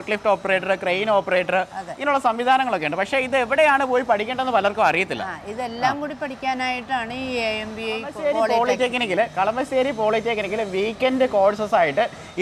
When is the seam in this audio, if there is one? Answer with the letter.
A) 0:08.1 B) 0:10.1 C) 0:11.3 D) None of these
A